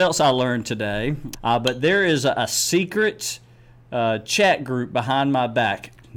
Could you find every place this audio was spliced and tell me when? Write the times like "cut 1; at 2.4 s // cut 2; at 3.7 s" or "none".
cut 1; at 1.3 s